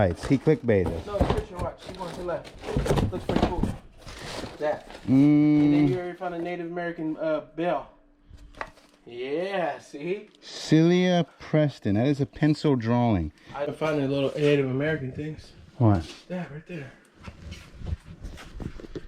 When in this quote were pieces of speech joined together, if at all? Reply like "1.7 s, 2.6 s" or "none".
13.7 s